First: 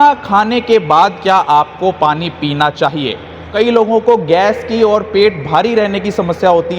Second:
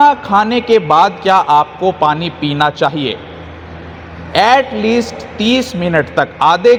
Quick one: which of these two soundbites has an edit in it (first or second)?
first